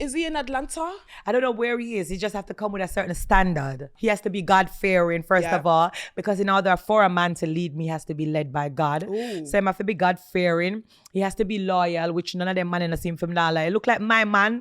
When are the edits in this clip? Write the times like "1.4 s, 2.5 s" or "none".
3.9 s